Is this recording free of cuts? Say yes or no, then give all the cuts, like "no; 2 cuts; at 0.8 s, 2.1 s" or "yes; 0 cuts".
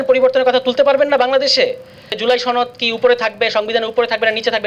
no; 1 cut; at 2.2 s